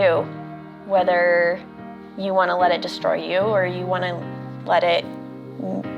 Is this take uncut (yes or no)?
yes